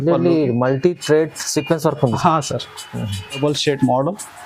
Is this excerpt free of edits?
yes; 0 cuts

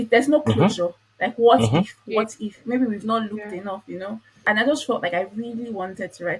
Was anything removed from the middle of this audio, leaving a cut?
no; 0 cuts

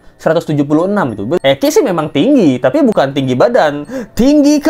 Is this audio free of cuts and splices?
no; 1 cut; at 1.4 s

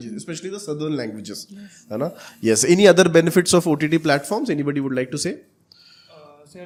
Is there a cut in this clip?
no; 0 cuts

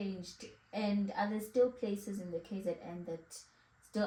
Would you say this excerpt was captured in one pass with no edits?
yes; 0 cuts

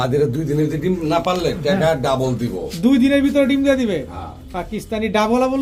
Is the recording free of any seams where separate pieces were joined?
yes; 0 cuts

